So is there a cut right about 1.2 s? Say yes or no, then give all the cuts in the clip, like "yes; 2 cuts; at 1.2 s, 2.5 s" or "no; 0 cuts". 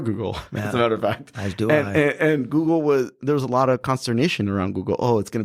no; 0 cuts